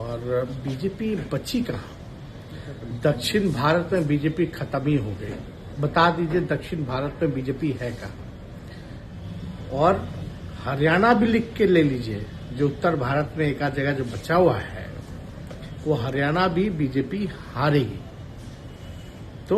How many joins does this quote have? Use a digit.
1